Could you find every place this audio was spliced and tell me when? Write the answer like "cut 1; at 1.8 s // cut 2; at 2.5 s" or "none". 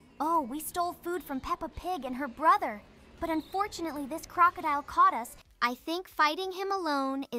cut 1; at 5.3 s